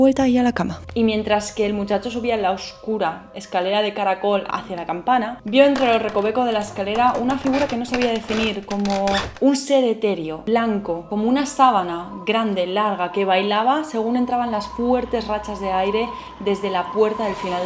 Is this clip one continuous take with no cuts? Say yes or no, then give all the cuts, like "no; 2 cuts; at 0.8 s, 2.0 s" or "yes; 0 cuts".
no; 2 cuts; at 4.5 s, 10.4 s